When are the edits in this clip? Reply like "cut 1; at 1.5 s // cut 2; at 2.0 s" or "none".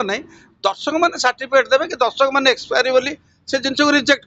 none